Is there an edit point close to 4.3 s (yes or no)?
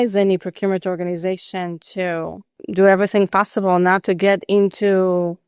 no